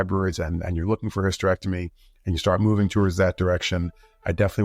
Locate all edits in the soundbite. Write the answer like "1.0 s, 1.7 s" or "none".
none